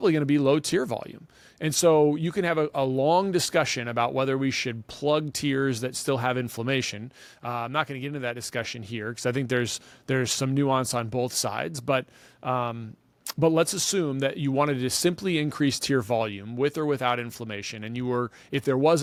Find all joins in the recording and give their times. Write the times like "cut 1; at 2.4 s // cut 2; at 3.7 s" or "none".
none